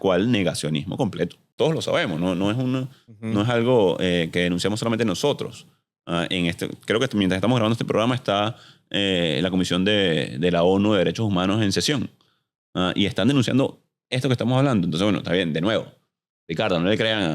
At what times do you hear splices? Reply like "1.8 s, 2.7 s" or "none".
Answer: 1.5 s